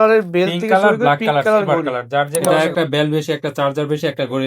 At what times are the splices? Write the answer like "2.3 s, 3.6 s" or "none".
2.5 s

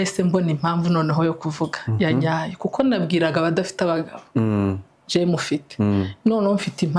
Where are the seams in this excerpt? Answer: none

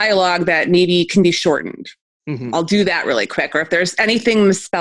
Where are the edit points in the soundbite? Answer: none

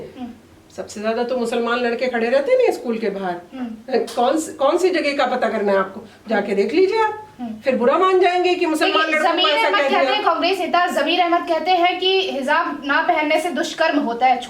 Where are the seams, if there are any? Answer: none

